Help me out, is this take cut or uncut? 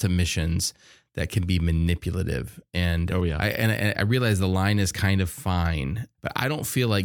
cut